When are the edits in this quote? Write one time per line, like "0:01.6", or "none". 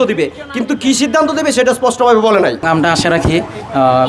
0:02.7